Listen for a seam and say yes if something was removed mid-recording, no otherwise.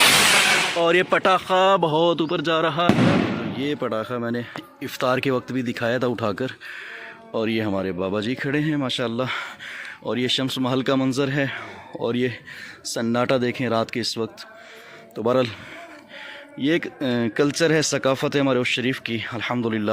yes